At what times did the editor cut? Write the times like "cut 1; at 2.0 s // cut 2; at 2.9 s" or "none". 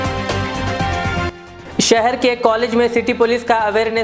none